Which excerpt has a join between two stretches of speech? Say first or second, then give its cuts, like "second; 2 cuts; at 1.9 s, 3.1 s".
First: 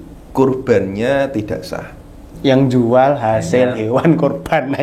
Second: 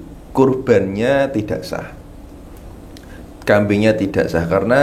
first; 1 cut; at 2.3 s